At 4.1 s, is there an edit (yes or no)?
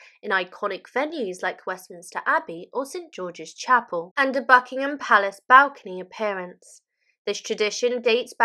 yes